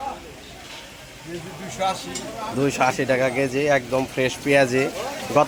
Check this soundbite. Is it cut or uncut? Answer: uncut